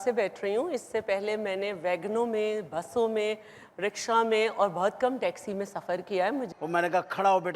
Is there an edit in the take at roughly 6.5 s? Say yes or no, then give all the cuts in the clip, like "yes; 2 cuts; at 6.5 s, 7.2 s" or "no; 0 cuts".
yes; 1 cut; at 6.5 s